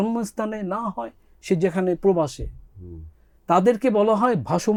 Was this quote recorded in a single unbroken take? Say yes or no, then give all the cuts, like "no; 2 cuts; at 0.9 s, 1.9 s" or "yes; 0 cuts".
yes; 0 cuts